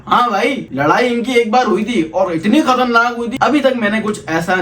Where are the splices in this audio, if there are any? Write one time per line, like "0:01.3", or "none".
0:03.3